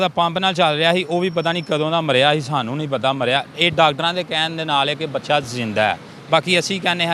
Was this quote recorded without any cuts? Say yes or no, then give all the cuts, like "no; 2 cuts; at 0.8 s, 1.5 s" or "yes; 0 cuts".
yes; 0 cuts